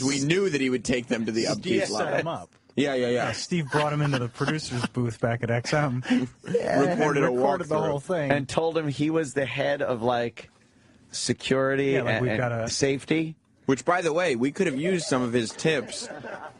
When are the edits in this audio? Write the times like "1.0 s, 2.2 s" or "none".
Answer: 9.1 s